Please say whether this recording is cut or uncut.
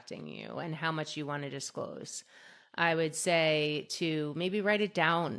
uncut